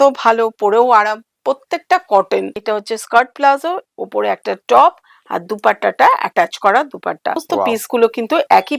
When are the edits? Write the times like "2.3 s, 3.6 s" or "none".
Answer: 2.6 s, 7.4 s